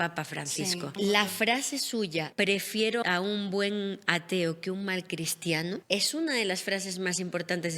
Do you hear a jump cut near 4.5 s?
no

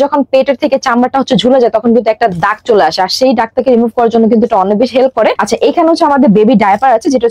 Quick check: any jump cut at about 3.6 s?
no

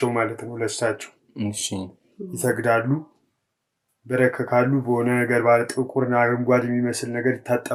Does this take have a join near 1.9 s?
no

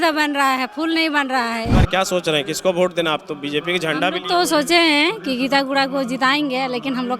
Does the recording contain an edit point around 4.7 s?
no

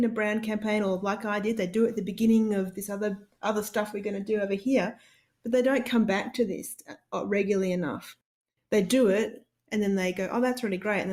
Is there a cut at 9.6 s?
no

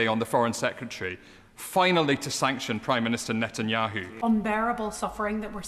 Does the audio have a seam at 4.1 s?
yes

